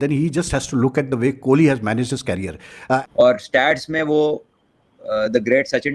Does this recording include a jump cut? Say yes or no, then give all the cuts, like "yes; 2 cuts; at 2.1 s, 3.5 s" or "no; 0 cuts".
yes; 1 cut; at 3.0 s